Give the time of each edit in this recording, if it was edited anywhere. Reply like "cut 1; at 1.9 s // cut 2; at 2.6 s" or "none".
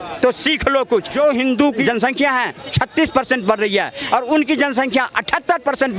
cut 1; at 1.1 s // cut 2; at 2.3 s